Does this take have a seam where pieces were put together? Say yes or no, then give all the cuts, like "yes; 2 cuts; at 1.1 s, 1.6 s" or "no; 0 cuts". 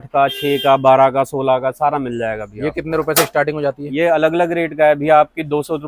no; 0 cuts